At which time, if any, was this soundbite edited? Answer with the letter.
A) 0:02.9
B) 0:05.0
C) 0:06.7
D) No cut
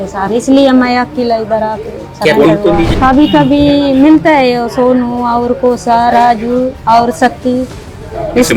A